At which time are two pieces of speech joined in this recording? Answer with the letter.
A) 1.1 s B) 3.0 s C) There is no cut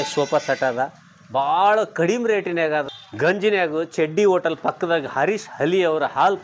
B